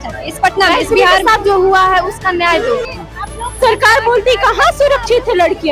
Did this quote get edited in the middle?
yes; 1 cut; at 3.0 s

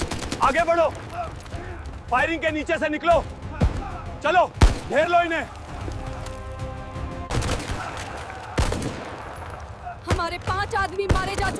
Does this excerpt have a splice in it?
yes; 1 cut; at 7.2 s

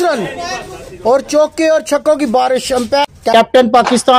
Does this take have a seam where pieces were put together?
yes; 1 cut; at 3.1 s

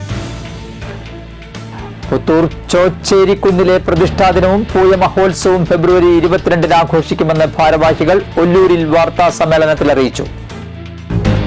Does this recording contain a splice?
no; 0 cuts

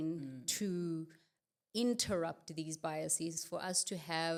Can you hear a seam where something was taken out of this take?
no; 0 cuts

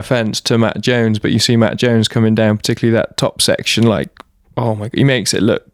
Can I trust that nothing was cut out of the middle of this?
yes; 0 cuts

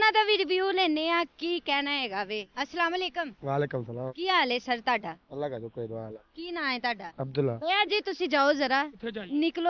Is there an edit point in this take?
yes; 1 cut; at 7.6 s

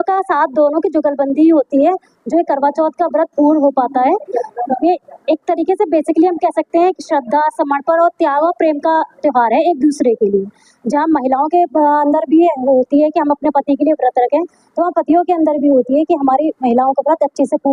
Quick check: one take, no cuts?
yes; 0 cuts

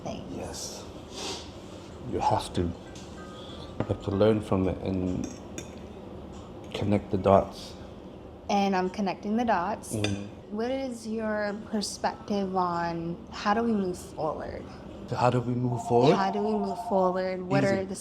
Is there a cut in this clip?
yes; 2 cuts; at 10.4 s, 15.0 s

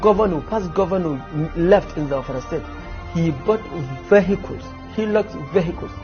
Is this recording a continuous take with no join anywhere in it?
yes; 0 cuts

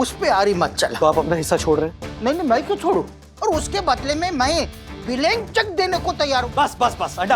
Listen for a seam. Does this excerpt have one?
yes; 3 cuts; at 0.9 s, 3.2 s, 6.4 s

